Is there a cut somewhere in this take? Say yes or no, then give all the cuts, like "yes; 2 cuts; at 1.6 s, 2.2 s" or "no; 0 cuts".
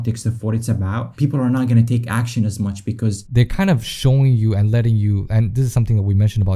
yes; 2 cuts; at 1.1 s, 3.2 s